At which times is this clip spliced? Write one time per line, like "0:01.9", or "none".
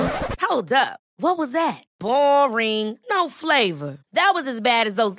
none